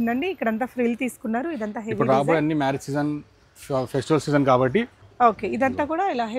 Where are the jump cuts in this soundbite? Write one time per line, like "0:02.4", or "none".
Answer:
0:05.0